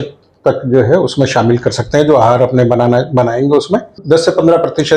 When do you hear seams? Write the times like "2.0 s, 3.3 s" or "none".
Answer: 3.9 s

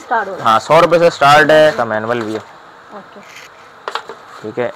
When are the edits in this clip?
1.8 s

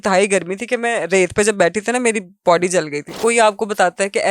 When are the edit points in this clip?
3.1 s

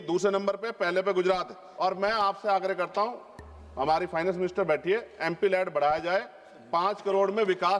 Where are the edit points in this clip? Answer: 1.6 s

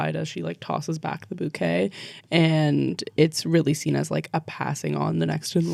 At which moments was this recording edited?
none

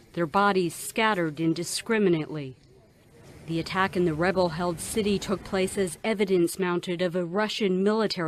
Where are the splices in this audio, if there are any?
none

